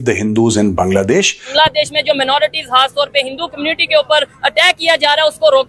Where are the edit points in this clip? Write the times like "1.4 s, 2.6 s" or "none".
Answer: 1.4 s